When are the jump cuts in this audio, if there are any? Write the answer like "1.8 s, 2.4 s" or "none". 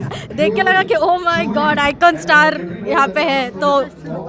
none